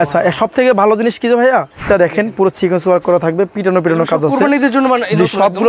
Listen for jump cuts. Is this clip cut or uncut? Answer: cut